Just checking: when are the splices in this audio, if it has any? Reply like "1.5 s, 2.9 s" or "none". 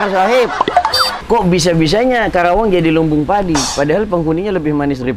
1.1 s

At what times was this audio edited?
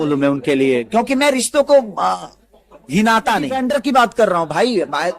3.6 s

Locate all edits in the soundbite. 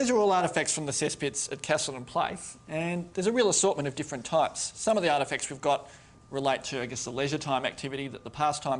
4.7 s

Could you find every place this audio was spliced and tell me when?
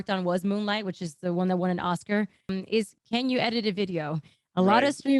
2.6 s

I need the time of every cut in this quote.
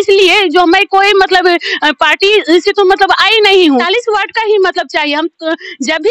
3.9 s

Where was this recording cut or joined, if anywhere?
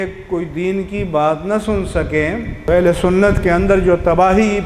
2.7 s

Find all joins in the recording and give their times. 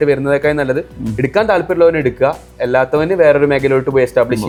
none

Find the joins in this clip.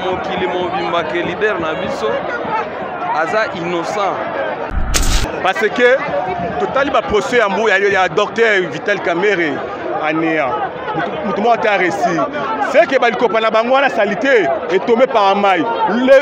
4.9 s

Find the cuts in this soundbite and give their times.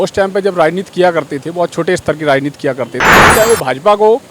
3.3 s

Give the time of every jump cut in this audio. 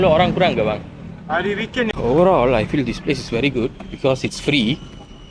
1.9 s

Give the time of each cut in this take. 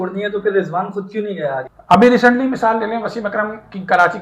1.6 s

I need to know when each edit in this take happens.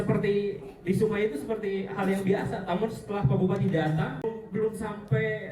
4.2 s

